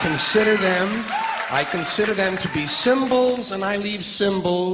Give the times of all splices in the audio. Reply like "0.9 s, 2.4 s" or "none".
none